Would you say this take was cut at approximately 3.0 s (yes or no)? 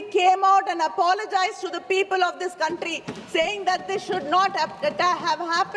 no